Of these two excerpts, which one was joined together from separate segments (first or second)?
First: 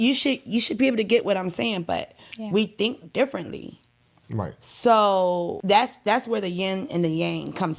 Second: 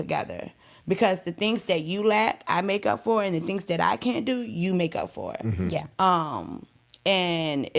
first